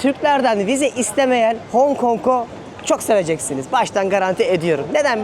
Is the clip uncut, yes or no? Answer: yes